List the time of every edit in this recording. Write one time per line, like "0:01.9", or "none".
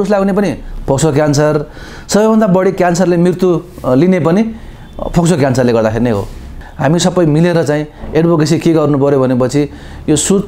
0:06.5

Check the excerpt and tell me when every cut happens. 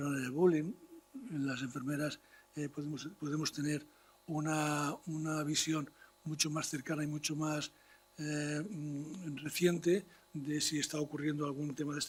none

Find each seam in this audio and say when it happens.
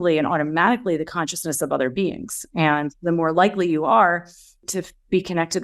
0:04.6

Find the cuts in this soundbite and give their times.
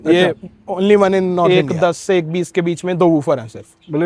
0:01.5

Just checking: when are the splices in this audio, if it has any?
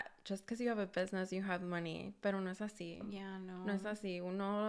none

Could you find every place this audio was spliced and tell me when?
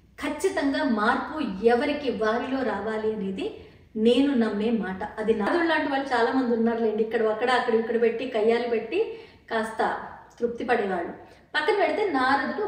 0:05.5

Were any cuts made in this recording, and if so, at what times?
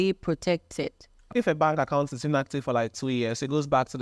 0:01.3

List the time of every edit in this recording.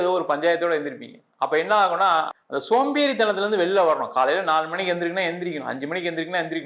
0:02.3

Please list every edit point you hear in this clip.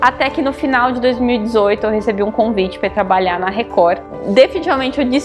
0:04.2

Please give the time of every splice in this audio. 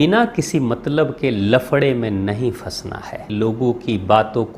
0:03.3

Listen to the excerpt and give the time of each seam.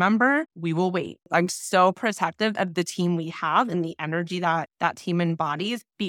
0:00.9
0:04.7

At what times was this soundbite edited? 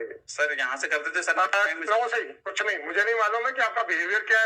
none

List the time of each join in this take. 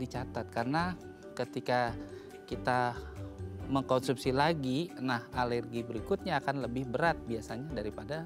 none

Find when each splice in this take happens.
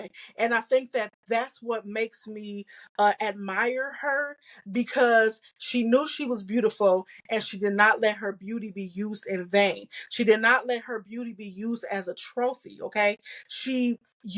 none

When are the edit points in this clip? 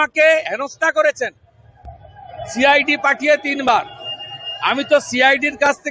none

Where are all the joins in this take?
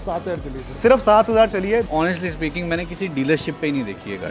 0:01.9

